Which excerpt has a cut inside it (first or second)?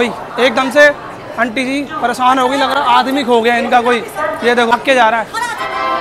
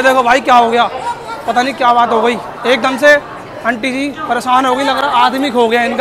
first